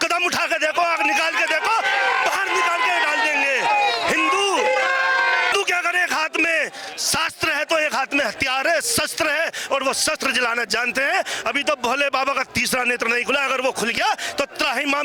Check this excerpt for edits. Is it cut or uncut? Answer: cut